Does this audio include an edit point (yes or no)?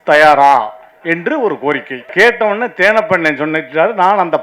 yes